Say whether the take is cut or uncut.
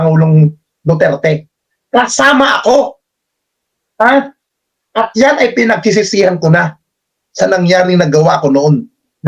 uncut